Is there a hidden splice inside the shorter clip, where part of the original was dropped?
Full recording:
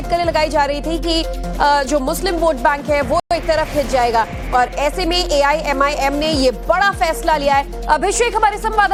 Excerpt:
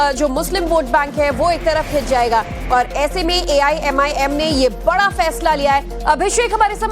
yes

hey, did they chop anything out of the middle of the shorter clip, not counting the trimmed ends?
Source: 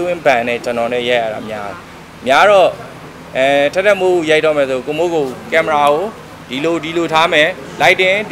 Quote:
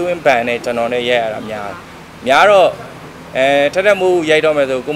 no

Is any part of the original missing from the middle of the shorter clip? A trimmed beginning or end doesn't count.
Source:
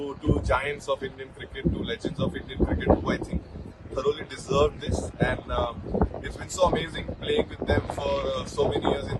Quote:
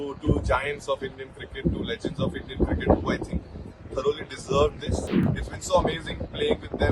yes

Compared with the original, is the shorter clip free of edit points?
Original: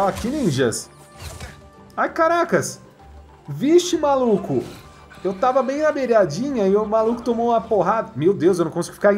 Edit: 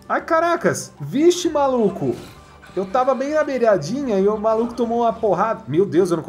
no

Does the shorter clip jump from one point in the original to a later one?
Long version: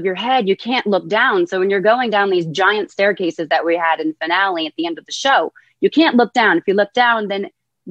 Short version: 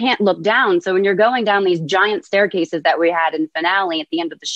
no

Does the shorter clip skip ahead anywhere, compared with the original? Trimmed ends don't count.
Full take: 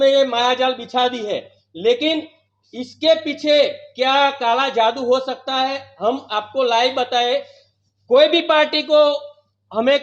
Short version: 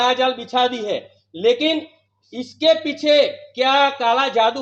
no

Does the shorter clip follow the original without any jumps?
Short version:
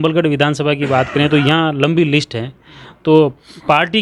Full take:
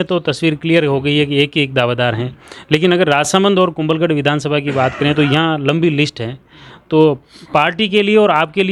yes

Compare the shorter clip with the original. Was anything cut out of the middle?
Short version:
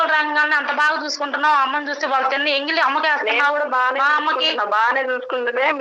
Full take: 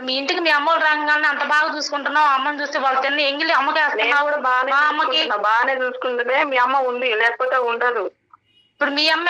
no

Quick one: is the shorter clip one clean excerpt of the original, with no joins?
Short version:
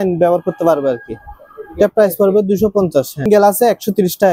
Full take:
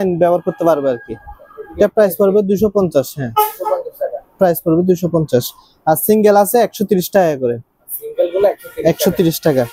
no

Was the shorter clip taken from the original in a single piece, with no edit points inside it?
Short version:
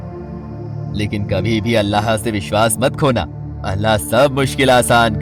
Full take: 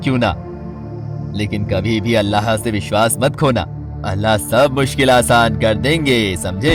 yes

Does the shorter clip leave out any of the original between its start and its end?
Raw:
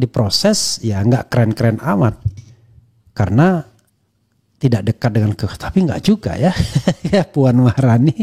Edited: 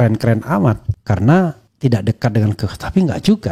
yes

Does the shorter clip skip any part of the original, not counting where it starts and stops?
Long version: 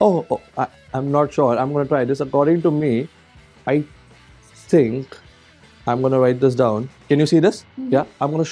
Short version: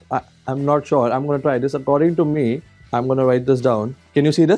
yes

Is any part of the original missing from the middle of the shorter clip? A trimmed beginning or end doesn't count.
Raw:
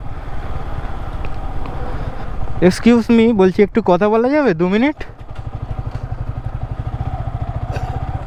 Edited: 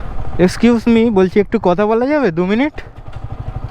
no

